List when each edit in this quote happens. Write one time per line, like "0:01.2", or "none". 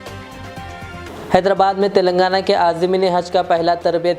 0:01.1